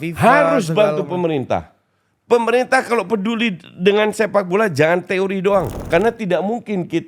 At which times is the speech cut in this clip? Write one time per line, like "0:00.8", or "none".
0:05.8